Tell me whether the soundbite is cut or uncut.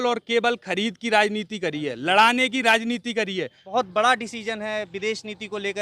cut